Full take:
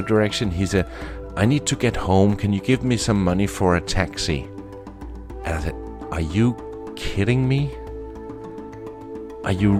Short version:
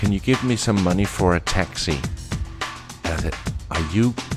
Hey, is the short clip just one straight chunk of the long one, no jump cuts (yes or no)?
yes